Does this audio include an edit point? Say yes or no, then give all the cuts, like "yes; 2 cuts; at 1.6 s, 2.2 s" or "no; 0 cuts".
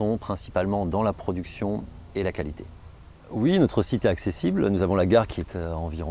no; 0 cuts